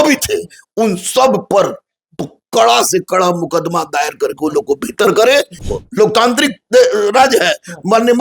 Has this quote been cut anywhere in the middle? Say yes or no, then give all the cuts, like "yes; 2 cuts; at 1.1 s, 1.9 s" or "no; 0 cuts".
yes; 1 cut; at 5.6 s